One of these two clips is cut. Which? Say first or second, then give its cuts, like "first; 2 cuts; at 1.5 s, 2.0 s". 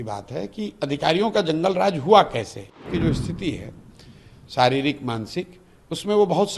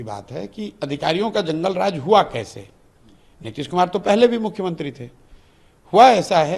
first; 1 cut; at 2.9 s